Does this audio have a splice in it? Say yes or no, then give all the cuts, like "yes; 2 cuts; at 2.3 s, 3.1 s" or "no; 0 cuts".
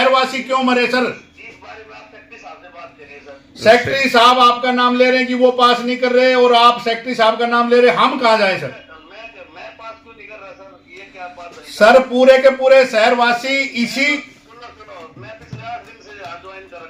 no; 0 cuts